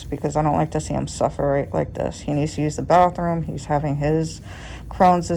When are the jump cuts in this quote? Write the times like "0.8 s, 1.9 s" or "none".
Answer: none